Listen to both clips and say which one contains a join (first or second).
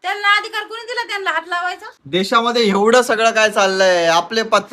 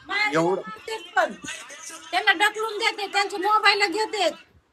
first